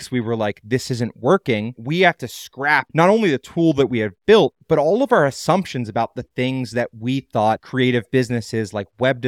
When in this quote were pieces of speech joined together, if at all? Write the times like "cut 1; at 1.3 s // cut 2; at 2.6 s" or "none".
none